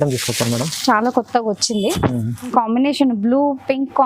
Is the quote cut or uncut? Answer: cut